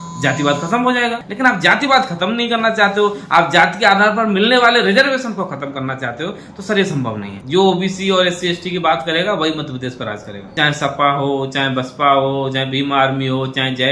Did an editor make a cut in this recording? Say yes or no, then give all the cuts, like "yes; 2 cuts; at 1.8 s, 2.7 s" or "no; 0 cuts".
yes; 3 cuts; at 1.3 s, 7.3 s, 10.4 s